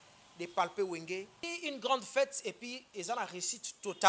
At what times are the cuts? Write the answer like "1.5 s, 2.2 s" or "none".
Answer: 1.5 s